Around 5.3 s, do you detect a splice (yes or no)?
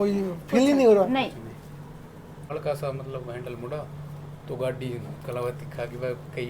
no